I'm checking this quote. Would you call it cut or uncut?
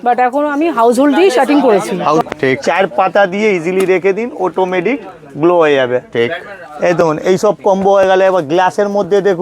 cut